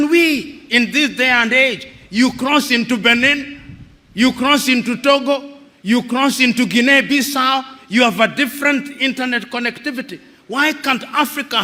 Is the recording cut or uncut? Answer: uncut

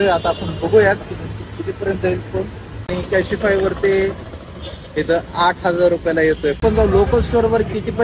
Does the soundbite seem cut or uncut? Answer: cut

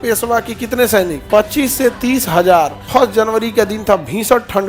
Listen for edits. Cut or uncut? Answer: cut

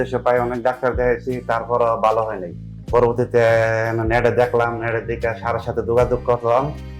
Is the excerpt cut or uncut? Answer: cut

